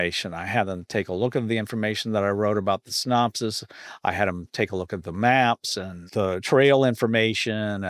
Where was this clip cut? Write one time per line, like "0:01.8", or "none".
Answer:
0:06.0